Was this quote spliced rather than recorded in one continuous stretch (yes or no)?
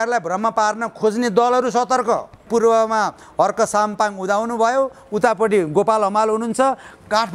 yes